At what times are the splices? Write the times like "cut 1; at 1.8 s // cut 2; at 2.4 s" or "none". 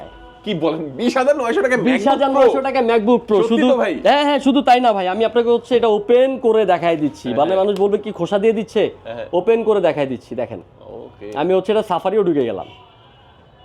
none